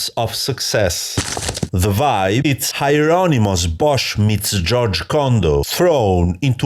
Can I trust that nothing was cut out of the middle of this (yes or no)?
no